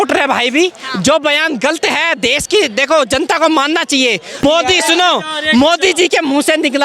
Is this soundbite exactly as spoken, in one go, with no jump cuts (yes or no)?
no